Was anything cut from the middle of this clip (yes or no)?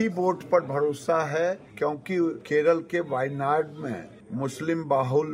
yes